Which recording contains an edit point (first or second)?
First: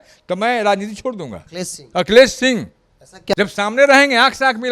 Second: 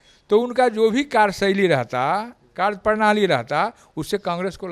first